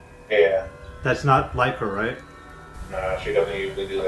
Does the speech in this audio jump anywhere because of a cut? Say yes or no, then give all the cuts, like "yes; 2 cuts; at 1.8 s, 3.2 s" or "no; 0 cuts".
no; 0 cuts